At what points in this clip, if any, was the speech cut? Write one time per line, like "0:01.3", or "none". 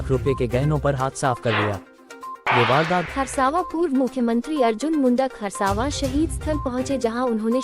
0:03.1